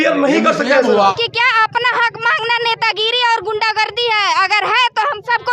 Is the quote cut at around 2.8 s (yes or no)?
no